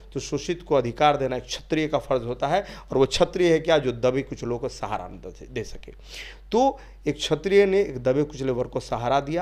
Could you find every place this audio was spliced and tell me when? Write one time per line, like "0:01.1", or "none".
none